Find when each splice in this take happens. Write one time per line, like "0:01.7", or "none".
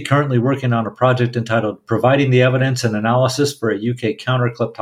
none